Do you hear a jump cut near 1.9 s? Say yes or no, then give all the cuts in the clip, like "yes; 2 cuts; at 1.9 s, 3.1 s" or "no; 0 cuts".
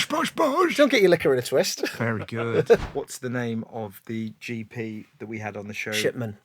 yes; 2 cuts; at 1.9 s, 2.9 s